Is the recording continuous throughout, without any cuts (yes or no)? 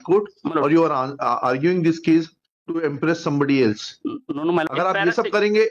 no